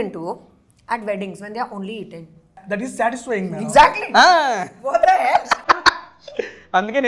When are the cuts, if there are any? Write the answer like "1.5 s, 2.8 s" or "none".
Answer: 2.6 s